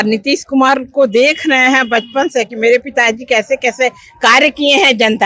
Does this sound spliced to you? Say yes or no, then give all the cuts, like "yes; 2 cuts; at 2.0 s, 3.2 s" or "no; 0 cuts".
no; 0 cuts